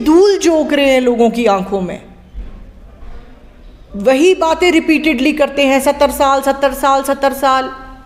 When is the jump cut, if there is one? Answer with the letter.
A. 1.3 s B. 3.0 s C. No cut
C